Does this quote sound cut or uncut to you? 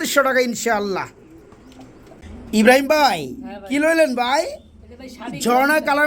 uncut